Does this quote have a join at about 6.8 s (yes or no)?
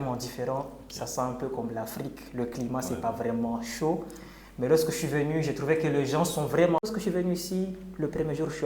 yes